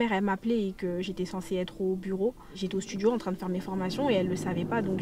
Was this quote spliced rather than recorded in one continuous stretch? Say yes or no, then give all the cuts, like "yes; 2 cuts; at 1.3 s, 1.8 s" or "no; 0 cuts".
yes; 1 cut; at 2.5 s